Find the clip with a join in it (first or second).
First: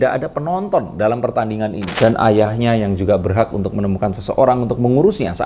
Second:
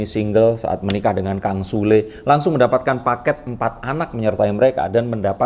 first